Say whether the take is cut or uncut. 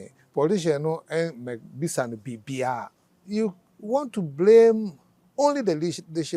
cut